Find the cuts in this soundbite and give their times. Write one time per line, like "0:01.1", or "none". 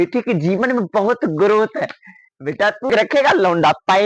0:02.9